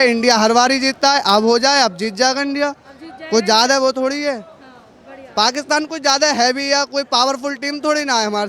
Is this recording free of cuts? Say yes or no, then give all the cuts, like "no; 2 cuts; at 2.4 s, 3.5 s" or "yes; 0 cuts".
yes; 0 cuts